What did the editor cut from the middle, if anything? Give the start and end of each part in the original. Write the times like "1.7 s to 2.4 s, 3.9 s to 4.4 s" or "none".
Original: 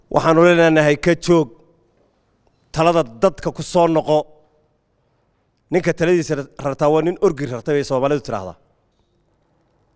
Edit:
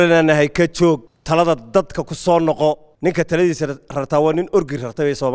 1.6 s to 2.6 s, 4.4 s to 5.6 s